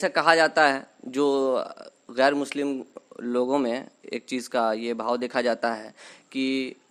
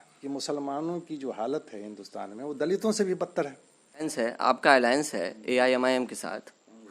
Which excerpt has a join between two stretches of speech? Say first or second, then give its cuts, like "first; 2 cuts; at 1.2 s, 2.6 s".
second; 1 cut; at 4.1 s